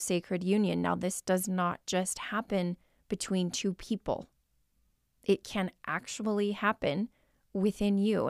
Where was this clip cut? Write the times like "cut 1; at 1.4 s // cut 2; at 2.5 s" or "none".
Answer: none